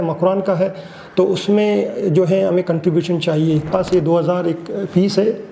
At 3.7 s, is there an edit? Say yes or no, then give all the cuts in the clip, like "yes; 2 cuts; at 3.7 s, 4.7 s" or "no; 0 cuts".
yes; 1 cut; at 3.7 s